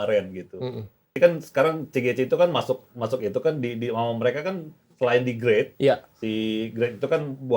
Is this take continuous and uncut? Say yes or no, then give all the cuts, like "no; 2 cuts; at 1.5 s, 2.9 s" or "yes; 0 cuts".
no; 1 cut; at 1.1 s